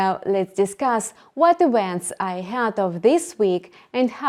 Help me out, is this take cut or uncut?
uncut